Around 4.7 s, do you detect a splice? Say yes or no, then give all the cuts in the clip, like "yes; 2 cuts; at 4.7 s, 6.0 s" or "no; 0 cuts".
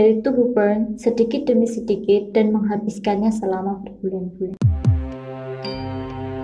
yes; 1 cut; at 4.7 s